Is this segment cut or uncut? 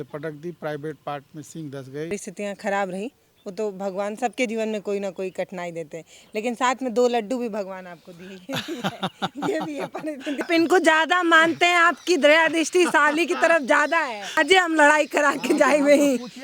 cut